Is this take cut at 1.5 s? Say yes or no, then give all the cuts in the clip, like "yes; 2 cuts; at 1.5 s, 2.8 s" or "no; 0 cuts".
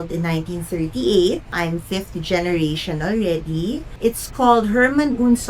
yes; 2 cuts; at 1.5 s, 3.9 s